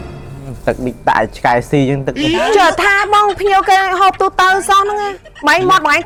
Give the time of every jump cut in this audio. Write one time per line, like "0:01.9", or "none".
none